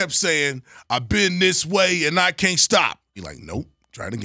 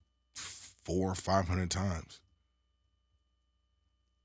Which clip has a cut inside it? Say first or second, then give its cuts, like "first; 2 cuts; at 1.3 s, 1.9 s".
first; 1 cut; at 3.3 s